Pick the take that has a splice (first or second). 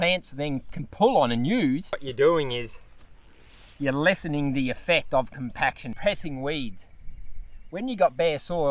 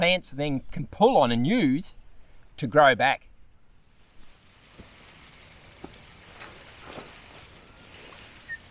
first